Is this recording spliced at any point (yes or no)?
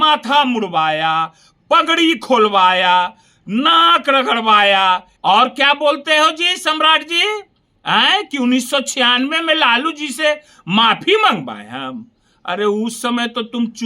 yes